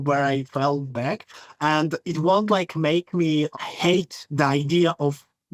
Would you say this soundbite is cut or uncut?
uncut